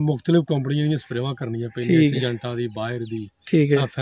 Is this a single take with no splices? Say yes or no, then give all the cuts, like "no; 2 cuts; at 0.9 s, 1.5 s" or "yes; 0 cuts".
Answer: yes; 0 cuts